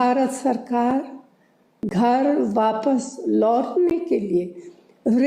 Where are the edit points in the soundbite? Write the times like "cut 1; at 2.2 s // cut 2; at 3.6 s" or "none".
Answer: cut 1; at 1.8 s